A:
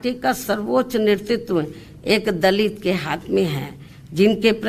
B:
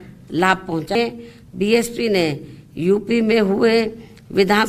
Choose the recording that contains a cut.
B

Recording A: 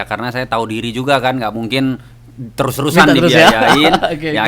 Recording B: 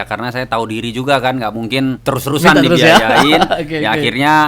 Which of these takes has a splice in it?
B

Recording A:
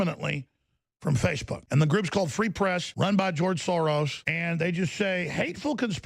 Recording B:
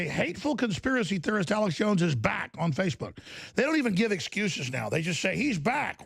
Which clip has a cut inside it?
A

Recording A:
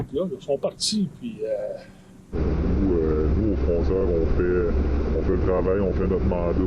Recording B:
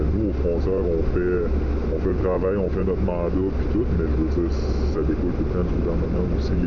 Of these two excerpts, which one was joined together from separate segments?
A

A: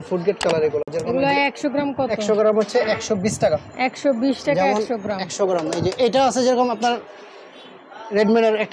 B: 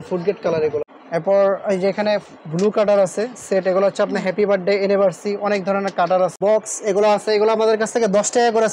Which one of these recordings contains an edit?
B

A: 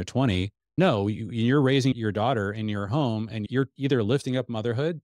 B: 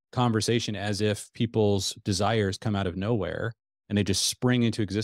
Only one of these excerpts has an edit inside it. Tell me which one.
A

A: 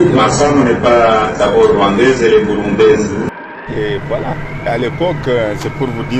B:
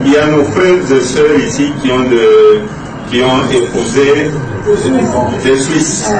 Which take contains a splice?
A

